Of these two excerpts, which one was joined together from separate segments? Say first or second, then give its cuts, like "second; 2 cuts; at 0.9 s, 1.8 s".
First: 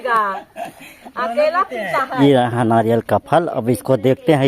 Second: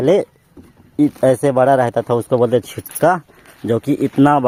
first; 1 cut; at 2.1 s